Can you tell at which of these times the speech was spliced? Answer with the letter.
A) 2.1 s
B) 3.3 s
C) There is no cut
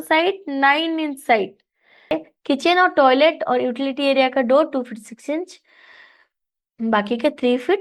A